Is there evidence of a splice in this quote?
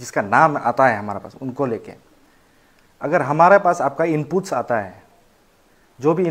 no; 0 cuts

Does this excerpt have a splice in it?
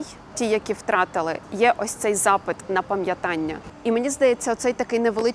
no; 0 cuts

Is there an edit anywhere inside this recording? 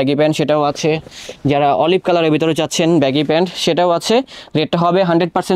no; 0 cuts

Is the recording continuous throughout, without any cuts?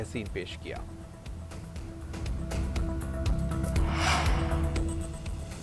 no; 1 cut; at 4.5 s

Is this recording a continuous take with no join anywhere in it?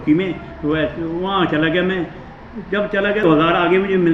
no; 1 cut; at 3.2 s

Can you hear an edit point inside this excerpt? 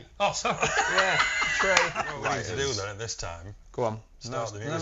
yes; 1 cut; at 2.2 s

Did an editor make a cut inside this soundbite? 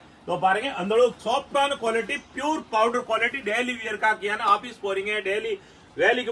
no; 0 cuts

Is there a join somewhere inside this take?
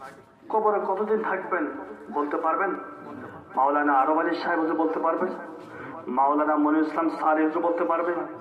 no; 0 cuts

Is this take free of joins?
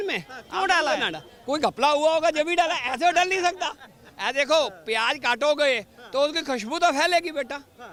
yes; 0 cuts

